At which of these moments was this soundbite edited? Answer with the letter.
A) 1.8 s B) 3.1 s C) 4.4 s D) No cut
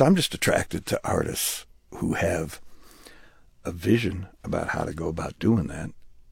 D